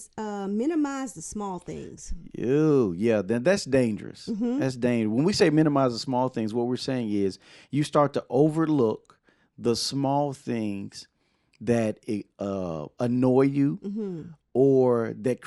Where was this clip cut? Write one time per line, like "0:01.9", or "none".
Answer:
none